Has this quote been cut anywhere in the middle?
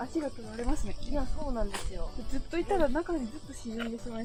no; 0 cuts

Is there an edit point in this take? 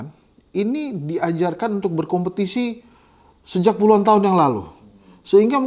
no; 0 cuts

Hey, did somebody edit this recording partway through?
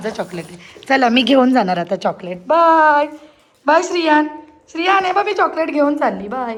no; 0 cuts

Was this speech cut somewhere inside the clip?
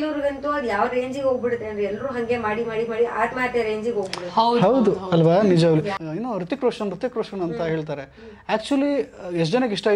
yes; 1 cut; at 6.0 s

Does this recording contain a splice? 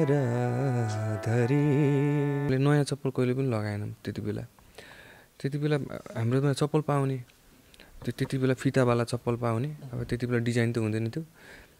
yes; 1 cut; at 2.5 s

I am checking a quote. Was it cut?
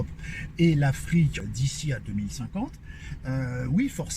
yes; 1 cut; at 1.4 s

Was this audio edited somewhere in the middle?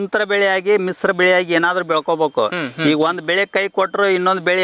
no; 0 cuts

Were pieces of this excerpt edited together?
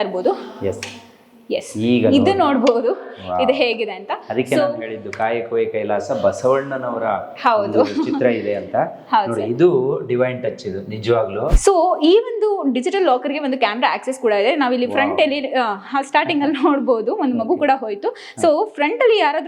yes; 1 cut; at 11.6 s

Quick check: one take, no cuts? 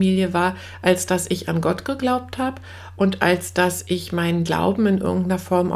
yes; 0 cuts

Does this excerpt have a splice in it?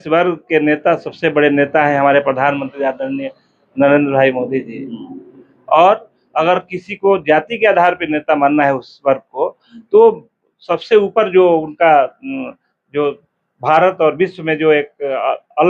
no; 0 cuts

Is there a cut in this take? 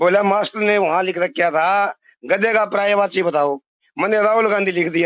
no; 0 cuts

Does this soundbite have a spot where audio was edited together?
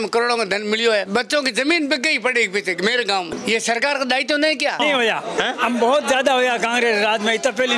yes; 3 cuts; at 1.1 s, 3.3 s, 4.8 s

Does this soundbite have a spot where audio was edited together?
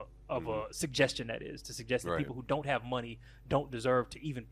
no; 0 cuts

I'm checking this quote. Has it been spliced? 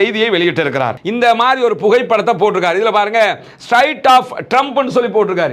yes; 1 cut; at 0.9 s

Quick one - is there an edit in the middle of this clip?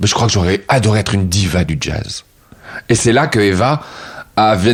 no; 0 cuts

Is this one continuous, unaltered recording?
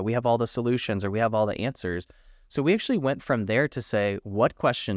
yes; 0 cuts

